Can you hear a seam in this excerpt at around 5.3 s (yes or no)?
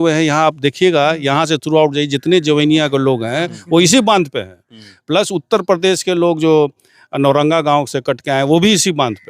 no